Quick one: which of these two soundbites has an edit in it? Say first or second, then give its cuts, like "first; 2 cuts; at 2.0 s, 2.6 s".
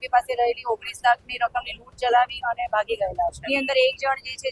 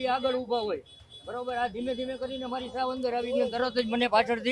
first; 1 cut; at 3.4 s